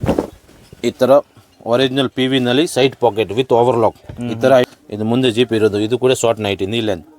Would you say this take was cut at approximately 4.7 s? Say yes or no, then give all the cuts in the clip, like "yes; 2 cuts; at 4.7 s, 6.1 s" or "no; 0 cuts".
yes; 1 cut; at 4.7 s